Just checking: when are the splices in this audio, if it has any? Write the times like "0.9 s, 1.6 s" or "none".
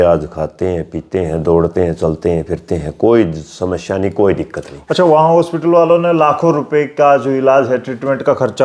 none